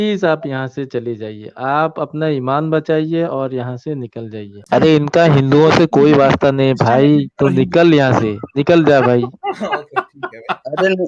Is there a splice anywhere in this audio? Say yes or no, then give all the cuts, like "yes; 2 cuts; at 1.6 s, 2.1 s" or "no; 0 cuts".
yes; 1 cut; at 4.6 s